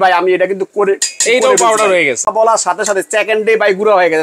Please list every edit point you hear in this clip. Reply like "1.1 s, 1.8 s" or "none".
2.3 s